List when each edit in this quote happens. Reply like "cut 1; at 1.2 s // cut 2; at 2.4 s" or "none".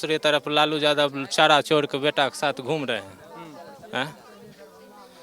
none